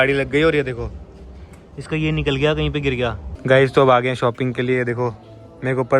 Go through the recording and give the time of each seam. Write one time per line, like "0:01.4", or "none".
0:03.3